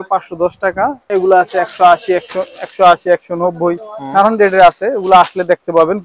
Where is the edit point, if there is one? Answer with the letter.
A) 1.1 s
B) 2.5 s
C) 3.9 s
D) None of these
A